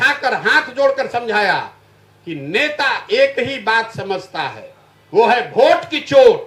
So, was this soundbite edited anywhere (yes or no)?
no